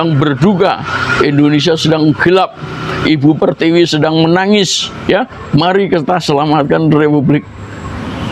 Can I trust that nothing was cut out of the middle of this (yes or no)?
yes